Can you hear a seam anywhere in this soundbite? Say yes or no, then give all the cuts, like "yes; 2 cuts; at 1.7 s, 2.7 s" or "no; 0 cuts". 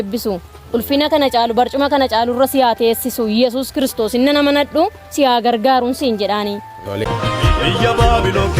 yes; 1 cut; at 7.0 s